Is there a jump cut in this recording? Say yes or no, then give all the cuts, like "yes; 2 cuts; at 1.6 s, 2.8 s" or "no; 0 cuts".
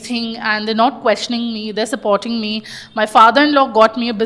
no; 0 cuts